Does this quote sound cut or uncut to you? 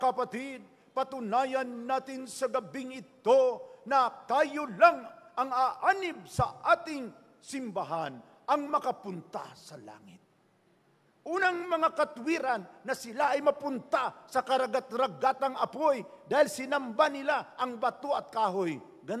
uncut